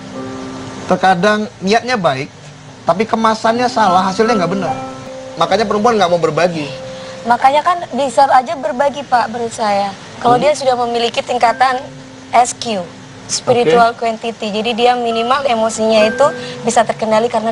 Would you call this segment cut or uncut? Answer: cut